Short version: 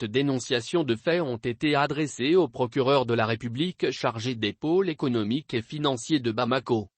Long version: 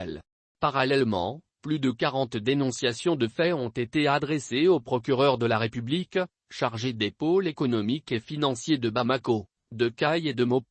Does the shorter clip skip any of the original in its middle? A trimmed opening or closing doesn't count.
yes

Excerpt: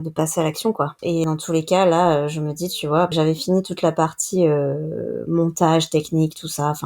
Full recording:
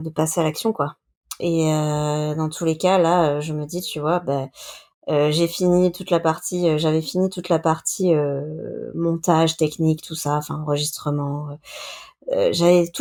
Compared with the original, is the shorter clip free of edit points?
no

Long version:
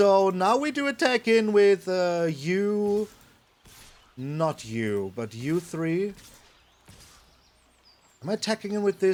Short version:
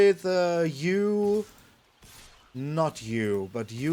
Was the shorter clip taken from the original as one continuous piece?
yes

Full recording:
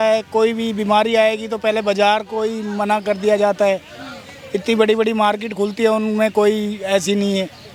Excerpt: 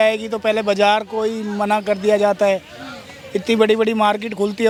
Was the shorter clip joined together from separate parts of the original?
no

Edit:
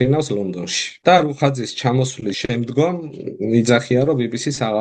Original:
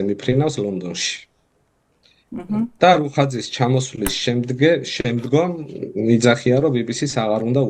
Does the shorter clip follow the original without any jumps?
no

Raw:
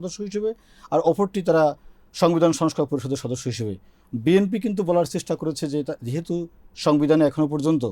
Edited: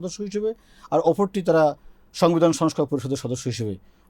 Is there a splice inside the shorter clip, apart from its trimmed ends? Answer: no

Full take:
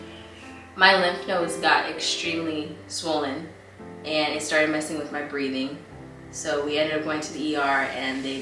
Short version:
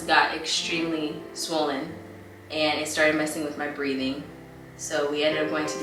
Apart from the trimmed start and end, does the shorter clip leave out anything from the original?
no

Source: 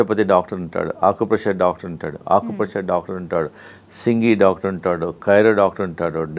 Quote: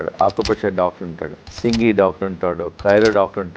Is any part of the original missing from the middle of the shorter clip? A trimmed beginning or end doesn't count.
yes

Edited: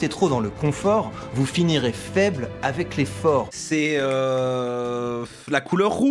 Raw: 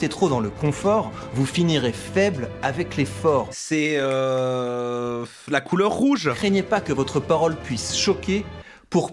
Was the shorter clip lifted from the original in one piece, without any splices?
yes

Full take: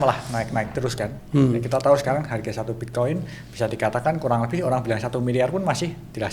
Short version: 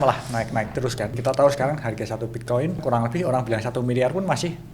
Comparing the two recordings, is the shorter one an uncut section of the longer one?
no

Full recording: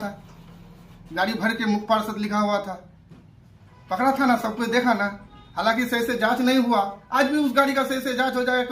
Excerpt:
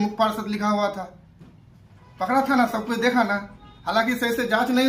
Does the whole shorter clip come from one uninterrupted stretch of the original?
yes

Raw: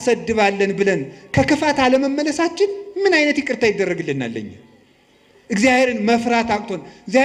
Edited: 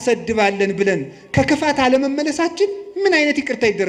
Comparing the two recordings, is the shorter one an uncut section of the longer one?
yes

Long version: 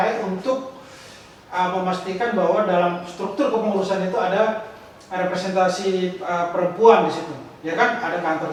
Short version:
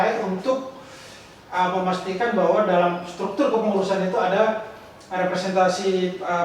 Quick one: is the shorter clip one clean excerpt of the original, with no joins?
yes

